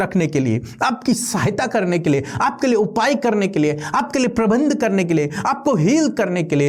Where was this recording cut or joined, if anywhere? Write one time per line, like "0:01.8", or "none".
none